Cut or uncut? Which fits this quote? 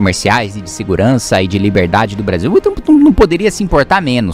uncut